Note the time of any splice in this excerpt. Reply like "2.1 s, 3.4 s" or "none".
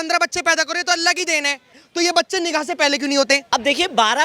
1.8 s, 3.4 s